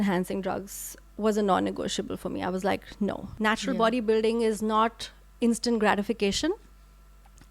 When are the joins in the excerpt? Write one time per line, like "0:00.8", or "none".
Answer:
0:03.2